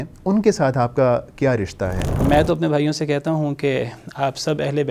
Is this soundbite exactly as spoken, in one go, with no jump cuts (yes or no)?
no